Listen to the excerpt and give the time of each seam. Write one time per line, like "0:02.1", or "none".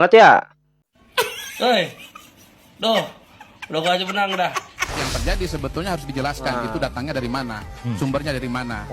0:05.0